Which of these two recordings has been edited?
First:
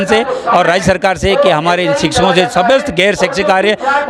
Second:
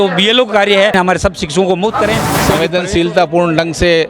second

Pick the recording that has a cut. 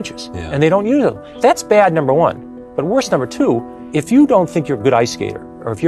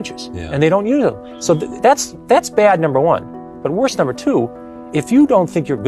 first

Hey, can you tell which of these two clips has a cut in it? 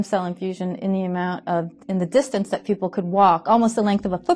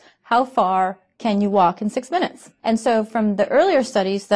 second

